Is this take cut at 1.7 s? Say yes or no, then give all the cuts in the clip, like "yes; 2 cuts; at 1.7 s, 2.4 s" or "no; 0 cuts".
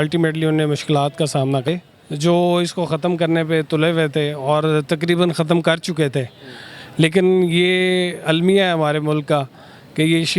yes; 1 cut; at 1.7 s